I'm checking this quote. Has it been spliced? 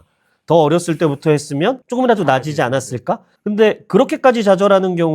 yes; 1 cut; at 3.3 s

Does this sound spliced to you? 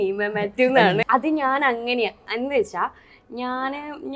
yes; 1 cut; at 1.0 s

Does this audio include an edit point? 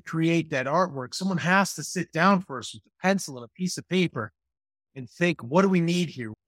no; 0 cuts

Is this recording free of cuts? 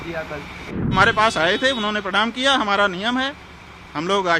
no; 1 cut; at 0.9 s

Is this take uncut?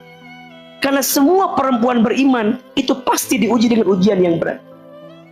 yes; 0 cuts

